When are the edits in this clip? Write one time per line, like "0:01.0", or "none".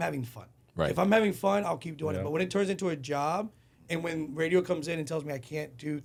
none